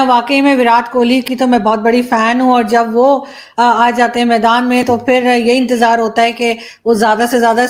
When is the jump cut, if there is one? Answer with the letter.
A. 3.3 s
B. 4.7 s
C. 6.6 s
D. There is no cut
D